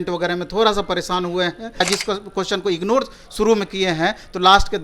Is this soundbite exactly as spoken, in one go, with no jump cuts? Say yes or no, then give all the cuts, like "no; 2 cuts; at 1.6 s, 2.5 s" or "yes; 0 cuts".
no; 1 cut; at 1.8 s